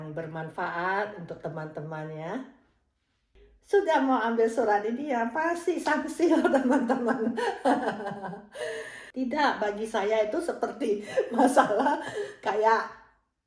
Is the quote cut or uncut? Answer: cut